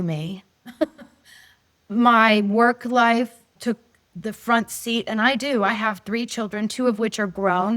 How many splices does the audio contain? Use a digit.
1